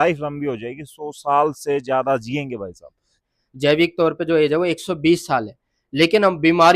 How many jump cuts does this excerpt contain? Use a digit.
1